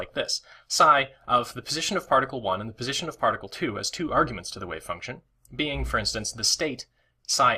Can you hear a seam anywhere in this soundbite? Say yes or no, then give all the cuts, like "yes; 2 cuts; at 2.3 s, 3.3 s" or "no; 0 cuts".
yes; 1 cut; at 6.4 s